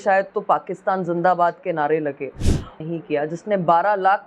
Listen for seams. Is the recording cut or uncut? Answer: cut